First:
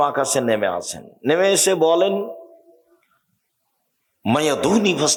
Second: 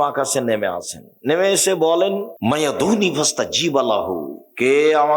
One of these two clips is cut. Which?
second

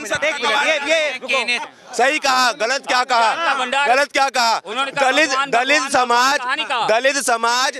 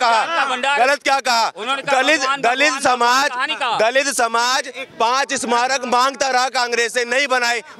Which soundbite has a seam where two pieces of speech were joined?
first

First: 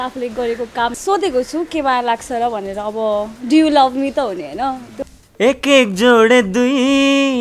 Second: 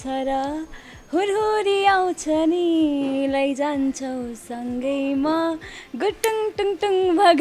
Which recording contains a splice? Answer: first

